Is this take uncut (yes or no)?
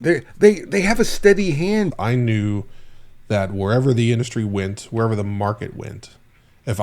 no